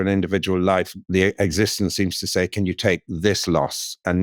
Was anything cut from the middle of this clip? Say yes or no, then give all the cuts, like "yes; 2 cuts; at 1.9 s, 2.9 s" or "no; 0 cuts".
yes; 1 cut; at 1.0 s